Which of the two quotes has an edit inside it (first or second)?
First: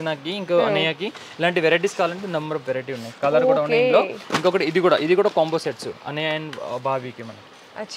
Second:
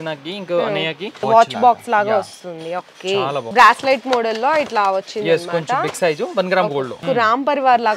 second